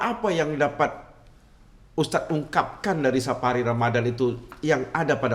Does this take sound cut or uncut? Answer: uncut